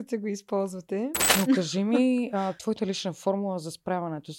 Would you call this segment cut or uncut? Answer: cut